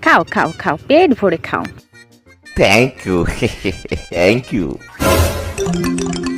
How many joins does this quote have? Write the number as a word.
one